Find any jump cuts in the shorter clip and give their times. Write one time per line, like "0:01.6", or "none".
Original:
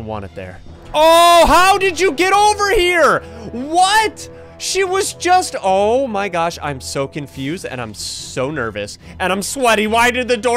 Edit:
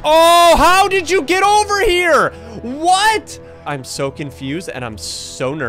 0:03.7